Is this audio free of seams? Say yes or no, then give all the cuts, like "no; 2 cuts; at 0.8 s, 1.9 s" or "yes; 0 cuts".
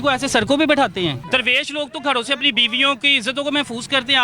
no; 1 cut; at 1.2 s